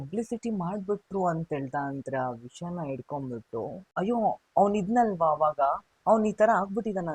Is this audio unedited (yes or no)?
no